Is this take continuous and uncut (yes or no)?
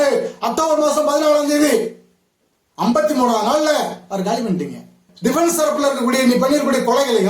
no